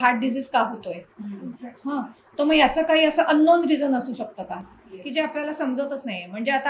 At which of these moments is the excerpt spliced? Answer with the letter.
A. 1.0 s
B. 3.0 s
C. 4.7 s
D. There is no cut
D